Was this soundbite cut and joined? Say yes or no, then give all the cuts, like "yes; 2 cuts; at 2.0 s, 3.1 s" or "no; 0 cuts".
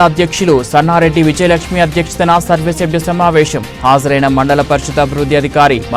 no; 0 cuts